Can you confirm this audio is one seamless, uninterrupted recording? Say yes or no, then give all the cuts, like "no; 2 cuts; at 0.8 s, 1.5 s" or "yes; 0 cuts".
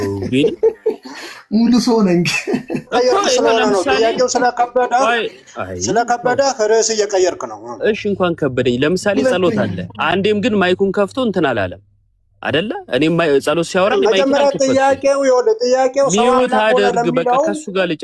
yes; 0 cuts